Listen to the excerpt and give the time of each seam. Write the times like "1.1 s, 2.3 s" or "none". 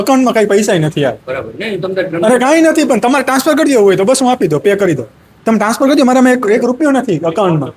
none